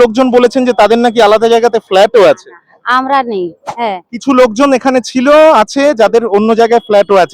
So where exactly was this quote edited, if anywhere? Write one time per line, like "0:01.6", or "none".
0:03.7